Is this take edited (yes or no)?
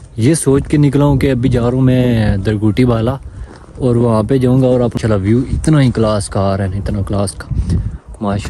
yes